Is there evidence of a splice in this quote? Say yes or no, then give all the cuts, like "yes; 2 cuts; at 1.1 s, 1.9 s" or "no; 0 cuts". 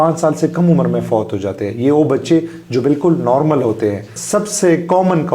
yes; 1 cut; at 4.2 s